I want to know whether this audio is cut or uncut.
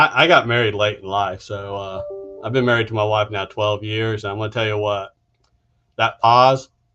uncut